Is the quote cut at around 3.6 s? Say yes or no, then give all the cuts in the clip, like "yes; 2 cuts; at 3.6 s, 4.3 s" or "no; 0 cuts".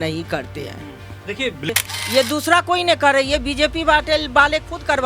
no; 1 cut; at 1.7 s